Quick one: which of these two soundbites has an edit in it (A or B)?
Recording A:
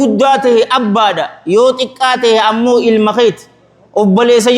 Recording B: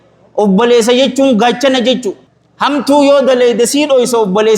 B